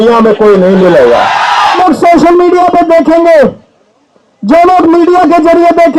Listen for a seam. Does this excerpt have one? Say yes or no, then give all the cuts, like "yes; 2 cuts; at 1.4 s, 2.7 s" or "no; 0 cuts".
yes; 1 cut; at 1.8 s